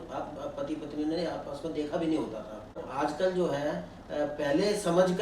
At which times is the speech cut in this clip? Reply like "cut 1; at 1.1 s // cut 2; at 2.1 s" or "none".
cut 1; at 2.8 s